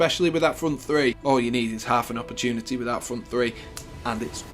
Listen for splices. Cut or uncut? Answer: cut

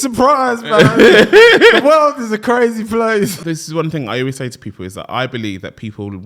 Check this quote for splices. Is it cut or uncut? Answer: cut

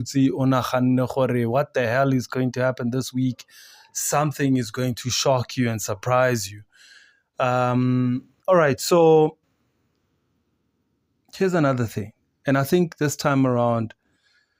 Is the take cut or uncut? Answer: uncut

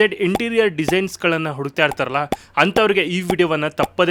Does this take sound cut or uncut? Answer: uncut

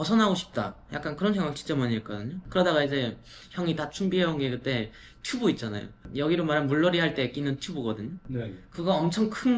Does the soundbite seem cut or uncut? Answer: cut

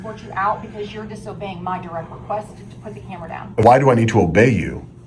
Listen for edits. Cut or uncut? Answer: cut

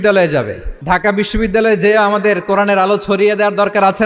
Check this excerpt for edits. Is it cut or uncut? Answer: cut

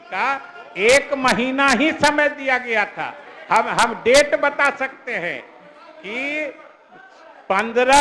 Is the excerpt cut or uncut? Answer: uncut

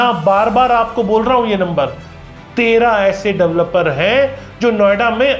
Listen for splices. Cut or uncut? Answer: uncut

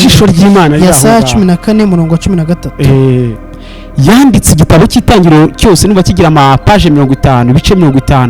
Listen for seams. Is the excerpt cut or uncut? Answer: cut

